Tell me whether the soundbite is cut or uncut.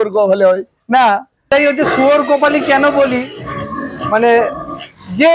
cut